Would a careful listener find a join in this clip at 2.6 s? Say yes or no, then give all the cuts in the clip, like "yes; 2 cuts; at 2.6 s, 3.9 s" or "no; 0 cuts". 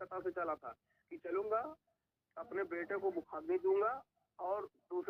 no; 0 cuts